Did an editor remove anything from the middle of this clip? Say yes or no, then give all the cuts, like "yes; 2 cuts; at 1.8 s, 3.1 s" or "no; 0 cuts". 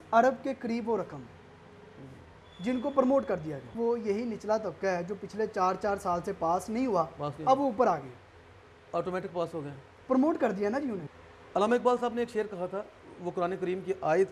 yes; 2 cuts; at 3.7 s, 11.1 s